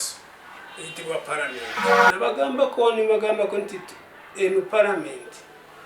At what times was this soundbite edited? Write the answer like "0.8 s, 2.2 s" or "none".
2.0 s